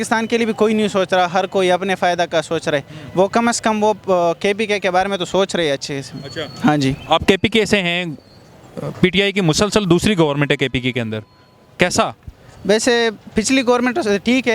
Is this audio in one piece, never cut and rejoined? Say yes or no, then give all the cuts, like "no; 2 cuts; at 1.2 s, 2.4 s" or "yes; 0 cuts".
yes; 0 cuts